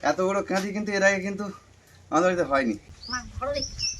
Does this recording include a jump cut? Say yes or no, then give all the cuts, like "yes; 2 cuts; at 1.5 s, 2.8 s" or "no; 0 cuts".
yes; 1 cut; at 2.9 s